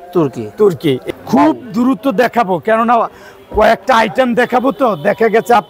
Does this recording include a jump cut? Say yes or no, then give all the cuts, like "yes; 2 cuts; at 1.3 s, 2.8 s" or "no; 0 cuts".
yes; 1 cut; at 1.0 s